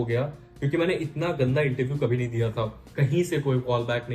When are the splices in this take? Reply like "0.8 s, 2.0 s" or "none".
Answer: 2.8 s